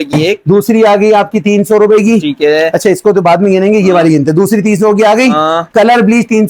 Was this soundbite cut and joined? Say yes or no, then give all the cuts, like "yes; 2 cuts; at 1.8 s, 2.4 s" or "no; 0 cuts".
no; 0 cuts